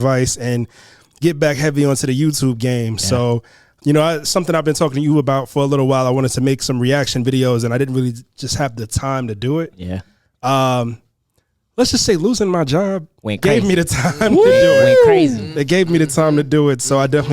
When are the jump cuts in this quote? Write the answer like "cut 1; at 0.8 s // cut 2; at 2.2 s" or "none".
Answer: cut 1; at 3.8 s